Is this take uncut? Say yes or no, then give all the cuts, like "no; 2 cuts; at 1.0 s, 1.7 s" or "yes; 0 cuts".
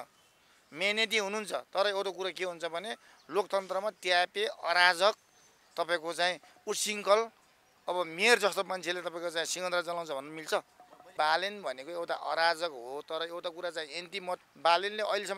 no; 2 cuts; at 11.1 s, 14.4 s